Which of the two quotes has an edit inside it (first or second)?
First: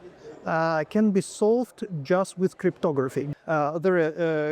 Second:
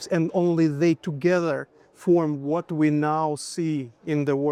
first